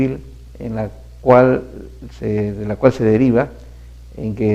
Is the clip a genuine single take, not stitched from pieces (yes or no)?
no